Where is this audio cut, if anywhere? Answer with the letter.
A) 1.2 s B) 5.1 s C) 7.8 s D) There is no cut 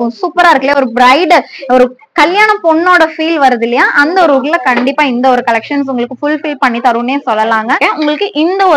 C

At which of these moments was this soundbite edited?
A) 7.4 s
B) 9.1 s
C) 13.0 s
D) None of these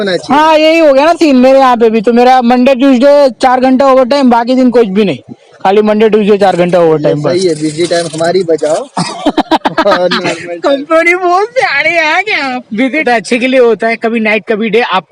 C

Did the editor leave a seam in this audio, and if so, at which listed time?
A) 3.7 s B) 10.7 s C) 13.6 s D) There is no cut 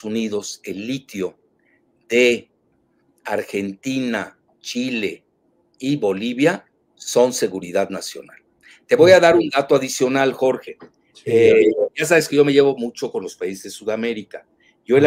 D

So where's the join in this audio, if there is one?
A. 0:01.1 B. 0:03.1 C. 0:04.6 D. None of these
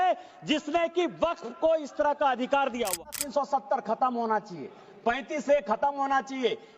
B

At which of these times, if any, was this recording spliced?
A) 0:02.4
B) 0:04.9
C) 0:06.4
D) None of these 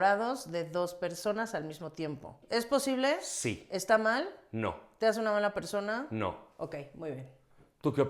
A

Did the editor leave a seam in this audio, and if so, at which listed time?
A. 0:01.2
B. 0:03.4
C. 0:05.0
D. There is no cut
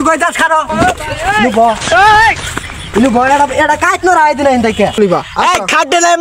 C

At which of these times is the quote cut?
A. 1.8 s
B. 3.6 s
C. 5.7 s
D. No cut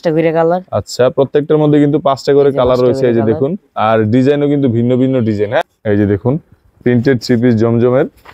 C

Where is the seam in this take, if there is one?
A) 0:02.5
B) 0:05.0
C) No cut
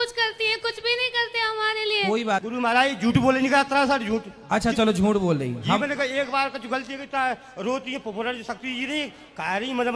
A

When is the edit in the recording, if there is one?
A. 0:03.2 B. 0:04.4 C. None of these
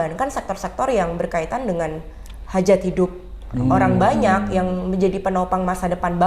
C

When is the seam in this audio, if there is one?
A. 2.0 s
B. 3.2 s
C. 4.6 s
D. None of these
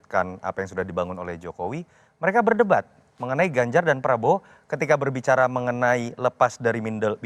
D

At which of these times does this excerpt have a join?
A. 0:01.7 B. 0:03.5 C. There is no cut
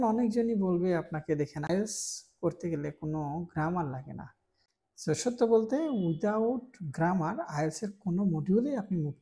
A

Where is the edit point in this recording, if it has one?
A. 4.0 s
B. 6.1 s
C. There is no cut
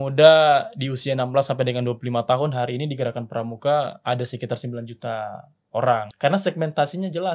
B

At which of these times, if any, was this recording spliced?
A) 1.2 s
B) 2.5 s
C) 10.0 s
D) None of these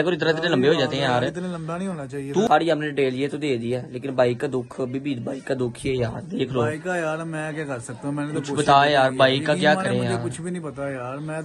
B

